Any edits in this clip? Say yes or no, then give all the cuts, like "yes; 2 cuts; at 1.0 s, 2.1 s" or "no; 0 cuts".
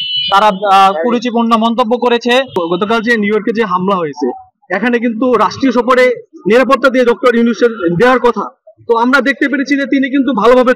yes; 1 cut; at 2.5 s